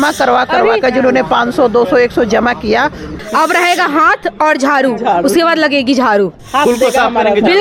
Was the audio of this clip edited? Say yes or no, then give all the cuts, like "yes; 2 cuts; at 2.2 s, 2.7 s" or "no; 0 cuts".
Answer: yes; 2 cuts; at 3.2 s, 6.4 s